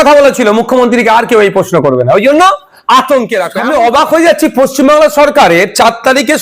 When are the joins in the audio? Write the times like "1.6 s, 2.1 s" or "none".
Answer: 3.6 s